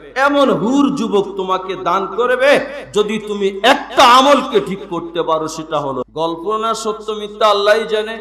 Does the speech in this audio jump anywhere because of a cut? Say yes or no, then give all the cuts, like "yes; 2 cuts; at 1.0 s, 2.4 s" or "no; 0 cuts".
yes; 1 cut; at 6.0 s